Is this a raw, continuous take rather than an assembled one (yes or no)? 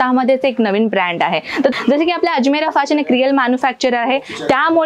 no